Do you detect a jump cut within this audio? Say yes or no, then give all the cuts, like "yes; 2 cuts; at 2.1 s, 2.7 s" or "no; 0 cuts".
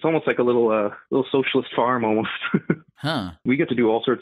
yes; 2 cuts; at 1.0 s, 3.4 s